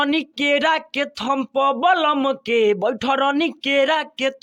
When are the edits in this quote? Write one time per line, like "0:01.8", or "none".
none